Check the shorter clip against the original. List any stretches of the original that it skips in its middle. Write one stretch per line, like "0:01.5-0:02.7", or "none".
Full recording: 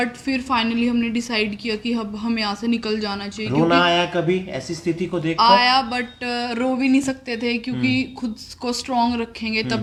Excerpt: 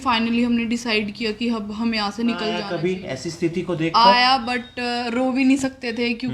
0:03.1-0:04.1